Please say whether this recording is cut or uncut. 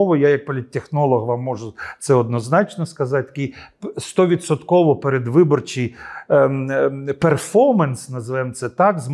uncut